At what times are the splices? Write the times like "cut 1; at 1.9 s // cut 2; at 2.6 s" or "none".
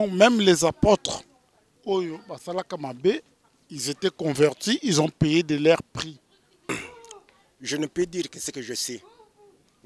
cut 1; at 6.7 s